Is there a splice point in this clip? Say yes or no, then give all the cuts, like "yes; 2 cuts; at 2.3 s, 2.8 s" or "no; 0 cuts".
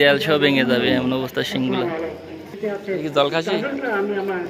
yes; 1 cut; at 2.5 s